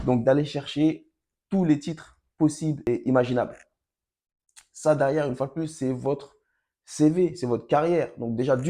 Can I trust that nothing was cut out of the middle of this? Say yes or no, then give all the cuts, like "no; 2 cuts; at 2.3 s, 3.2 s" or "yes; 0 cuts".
no; 1 cut; at 2.9 s